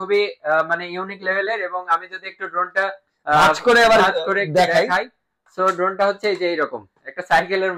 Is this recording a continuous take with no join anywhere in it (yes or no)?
yes